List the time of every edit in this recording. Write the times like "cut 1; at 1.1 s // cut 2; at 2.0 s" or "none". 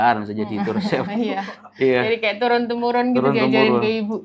none